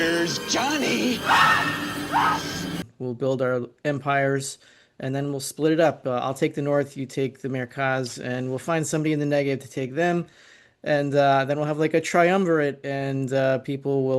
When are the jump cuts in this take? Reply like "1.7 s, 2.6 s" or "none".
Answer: 2.8 s